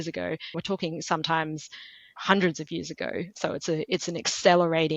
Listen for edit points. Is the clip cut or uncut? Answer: uncut